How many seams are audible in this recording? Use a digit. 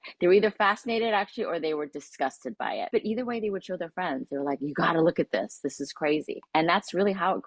2